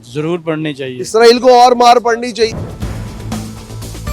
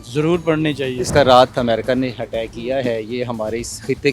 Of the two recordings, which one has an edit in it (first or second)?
second